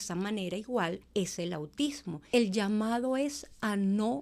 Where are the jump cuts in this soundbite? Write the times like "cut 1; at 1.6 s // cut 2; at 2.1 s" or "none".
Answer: cut 1; at 1.0 s // cut 2; at 2.1 s